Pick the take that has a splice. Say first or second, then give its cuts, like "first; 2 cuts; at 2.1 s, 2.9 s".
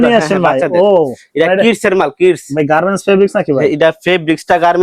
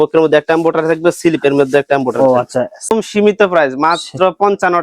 second; 1 cut; at 2.9 s